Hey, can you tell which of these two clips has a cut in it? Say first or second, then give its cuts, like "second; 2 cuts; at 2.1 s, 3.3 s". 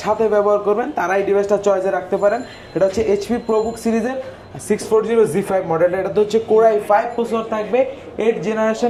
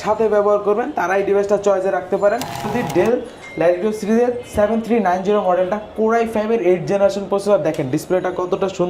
second; 1 cut; at 2.7 s